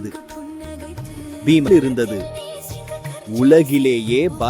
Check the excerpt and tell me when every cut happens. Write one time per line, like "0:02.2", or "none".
0:01.7